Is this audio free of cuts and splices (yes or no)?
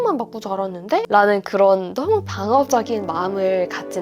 yes